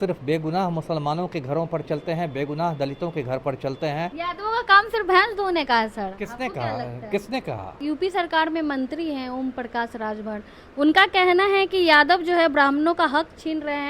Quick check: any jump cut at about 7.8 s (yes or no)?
yes